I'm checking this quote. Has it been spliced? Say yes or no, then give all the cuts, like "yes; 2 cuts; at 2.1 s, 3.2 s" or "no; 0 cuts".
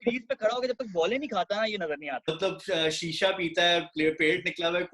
yes; 1 cut; at 2.2 s